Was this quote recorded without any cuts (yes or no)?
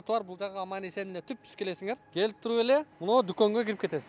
no